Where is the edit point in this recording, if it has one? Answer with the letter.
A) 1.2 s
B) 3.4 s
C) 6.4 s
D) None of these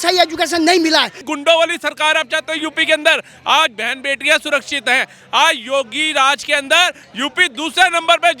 A